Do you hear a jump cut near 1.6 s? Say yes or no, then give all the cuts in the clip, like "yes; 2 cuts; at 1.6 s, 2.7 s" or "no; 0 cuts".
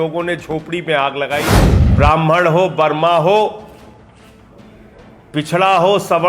yes; 1 cut; at 1.6 s